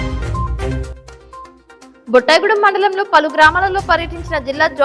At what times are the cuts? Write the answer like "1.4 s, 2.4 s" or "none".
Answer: 1.5 s